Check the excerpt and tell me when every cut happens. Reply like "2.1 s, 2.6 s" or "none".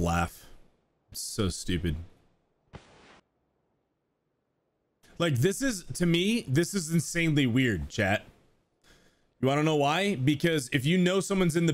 3.2 s